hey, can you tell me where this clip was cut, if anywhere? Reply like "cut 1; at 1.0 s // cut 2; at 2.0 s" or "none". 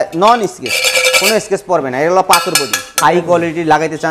cut 1; at 3.0 s

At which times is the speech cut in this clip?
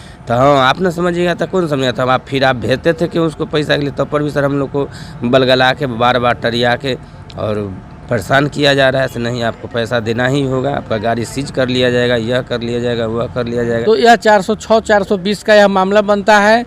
cut 1; at 13.8 s

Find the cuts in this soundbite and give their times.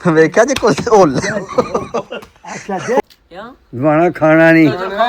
cut 1; at 3.0 s

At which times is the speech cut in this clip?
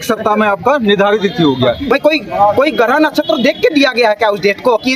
cut 1; at 1.8 s

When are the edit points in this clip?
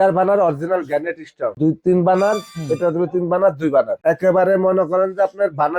cut 1; at 1.6 s // cut 2; at 4.0 s

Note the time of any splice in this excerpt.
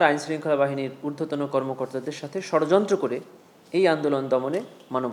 none

